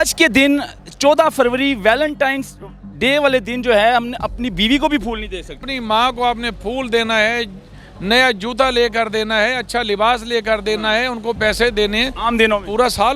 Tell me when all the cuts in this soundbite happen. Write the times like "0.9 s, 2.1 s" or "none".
5.6 s